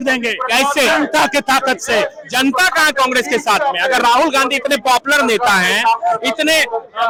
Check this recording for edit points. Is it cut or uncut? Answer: uncut